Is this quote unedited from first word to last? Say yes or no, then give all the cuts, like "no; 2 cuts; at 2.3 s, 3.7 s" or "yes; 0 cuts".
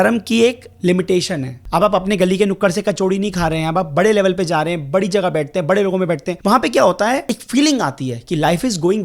no; 3 cuts; at 1.6 s, 6.3 s, 7.3 s